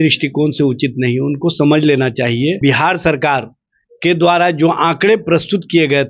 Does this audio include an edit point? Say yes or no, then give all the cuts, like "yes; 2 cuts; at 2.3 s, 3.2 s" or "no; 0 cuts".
yes; 1 cut; at 2.6 s